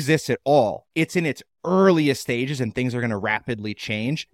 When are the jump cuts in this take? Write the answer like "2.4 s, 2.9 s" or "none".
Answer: none